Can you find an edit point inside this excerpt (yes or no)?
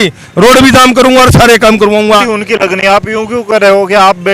yes